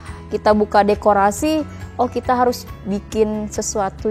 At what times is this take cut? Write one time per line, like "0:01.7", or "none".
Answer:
none